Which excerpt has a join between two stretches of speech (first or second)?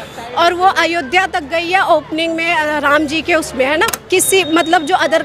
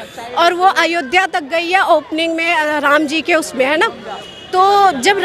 first